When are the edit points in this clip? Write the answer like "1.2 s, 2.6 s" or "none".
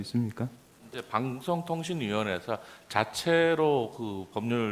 1.0 s